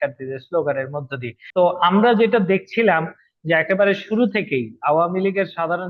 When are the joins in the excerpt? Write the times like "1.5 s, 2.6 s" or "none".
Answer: none